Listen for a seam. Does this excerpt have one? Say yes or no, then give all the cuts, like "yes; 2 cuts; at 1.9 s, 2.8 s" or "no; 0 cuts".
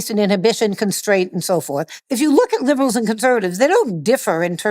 yes; 1 cut; at 2.0 s